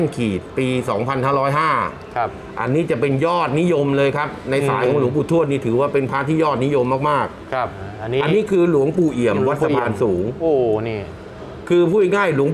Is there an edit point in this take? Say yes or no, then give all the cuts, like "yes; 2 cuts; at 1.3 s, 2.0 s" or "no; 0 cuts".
yes; 1 cut; at 7.8 s